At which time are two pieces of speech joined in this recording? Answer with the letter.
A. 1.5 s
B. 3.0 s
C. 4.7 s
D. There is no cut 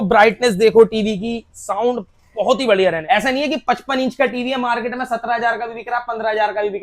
B